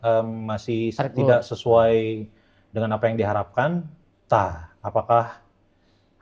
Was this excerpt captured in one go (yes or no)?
yes